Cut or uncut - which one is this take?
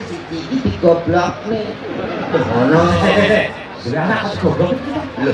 uncut